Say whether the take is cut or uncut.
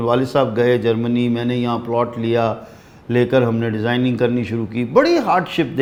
uncut